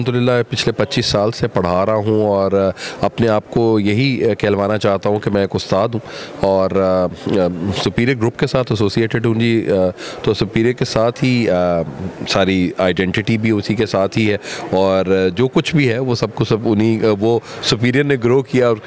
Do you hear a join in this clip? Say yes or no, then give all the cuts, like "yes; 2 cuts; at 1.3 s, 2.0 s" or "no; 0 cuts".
no; 0 cuts